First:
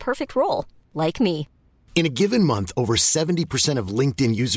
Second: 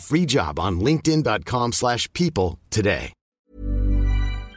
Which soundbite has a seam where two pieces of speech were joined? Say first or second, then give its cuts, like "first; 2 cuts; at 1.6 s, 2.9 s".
second; 1 cut; at 3.4 s